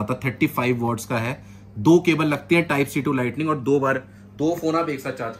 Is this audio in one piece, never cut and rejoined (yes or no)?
yes